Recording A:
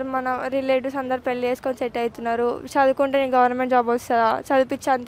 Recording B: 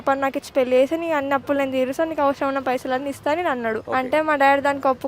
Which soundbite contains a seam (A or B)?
B